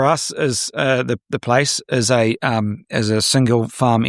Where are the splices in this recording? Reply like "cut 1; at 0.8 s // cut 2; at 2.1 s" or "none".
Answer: none